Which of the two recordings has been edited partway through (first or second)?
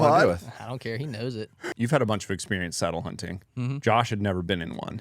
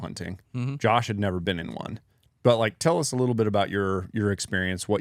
first